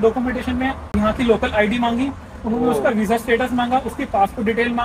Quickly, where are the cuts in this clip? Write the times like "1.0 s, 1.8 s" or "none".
0.9 s